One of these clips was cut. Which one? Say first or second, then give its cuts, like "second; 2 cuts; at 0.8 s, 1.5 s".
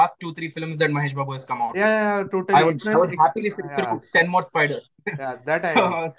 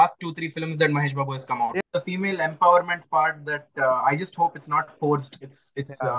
second; 1 cut; at 1.8 s